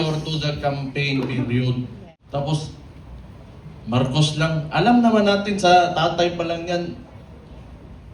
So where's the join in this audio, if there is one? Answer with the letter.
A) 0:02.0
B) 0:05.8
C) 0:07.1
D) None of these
A